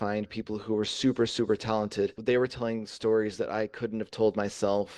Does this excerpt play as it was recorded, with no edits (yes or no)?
no